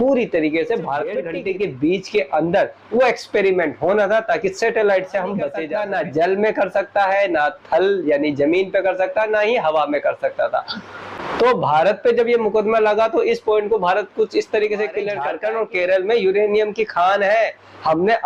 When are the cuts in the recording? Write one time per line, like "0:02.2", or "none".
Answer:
0:01.3
0:05.6
0:15.3